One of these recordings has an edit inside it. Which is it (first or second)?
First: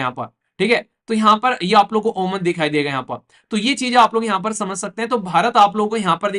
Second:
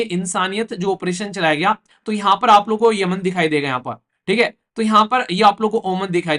second